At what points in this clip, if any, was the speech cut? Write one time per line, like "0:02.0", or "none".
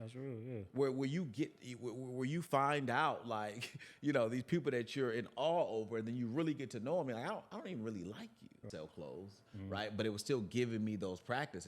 0:08.6